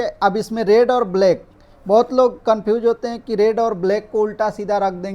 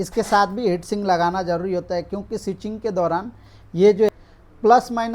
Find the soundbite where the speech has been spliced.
second; 1 cut; at 4.1 s

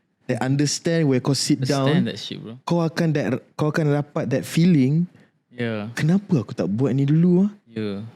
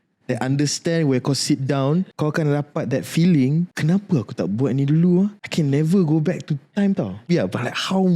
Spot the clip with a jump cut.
second; 4 cuts; at 2.1 s, 3.7 s, 5.4 s, 7.3 s

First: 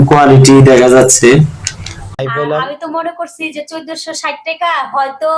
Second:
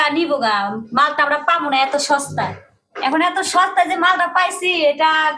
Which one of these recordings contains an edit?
first; 1 cut; at 2.1 s

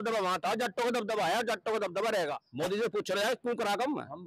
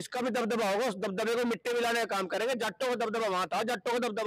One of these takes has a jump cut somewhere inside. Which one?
first; 1 cut; at 2.4 s

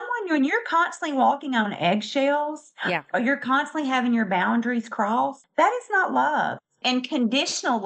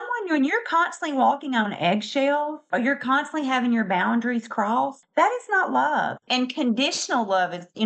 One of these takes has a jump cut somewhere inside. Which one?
second; 2 cuts; at 2.6 s, 6.2 s

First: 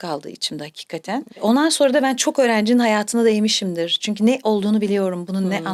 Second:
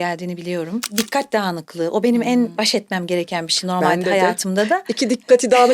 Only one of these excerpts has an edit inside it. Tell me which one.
second; 2 cuts; at 0.9 s, 2.5 s

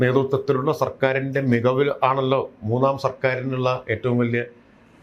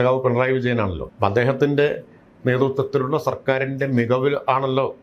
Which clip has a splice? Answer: second; 1 cut; at 1.0 s

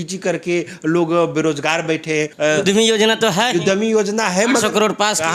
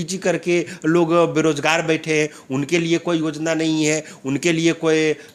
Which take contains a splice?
first; 1 cut; at 2.3 s

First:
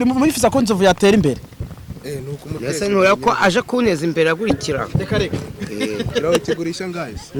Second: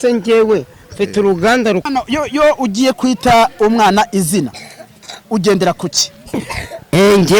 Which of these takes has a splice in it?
second; 1 cut; at 1.9 s

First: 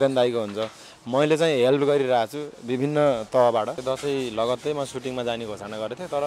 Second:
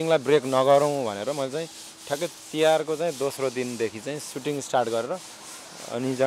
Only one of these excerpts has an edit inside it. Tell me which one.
first; 1 cut; at 3.8 s

